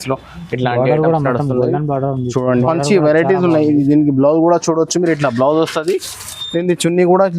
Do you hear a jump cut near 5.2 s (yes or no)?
no